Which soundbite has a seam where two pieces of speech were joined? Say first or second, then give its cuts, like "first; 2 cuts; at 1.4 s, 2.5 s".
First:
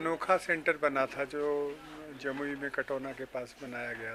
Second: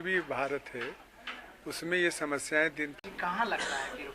second; 1 cut; at 2.9 s